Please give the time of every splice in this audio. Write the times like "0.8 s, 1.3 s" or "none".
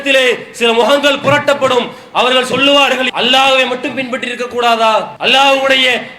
3.0 s, 5.1 s

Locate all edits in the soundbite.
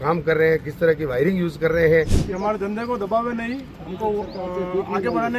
2.2 s

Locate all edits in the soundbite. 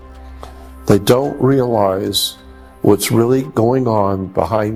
none

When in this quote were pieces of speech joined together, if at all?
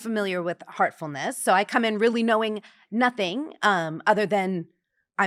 none

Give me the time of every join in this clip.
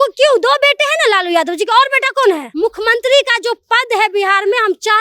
2.5 s

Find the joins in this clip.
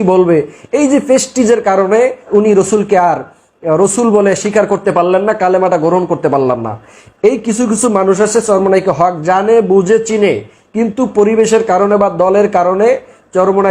2.2 s

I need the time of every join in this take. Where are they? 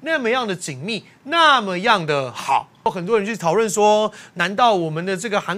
2.9 s

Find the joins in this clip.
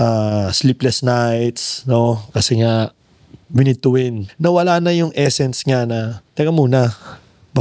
4.2 s, 6.2 s

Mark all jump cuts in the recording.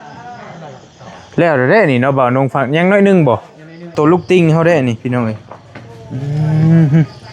3.9 s

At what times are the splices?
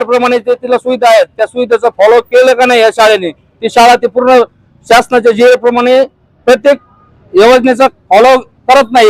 none

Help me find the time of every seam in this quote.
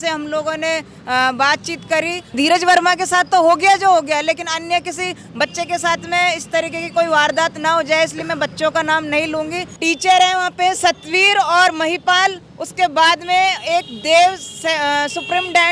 2.3 s, 9.7 s

